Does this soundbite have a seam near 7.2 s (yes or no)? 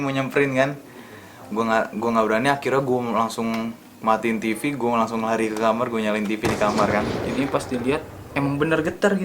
yes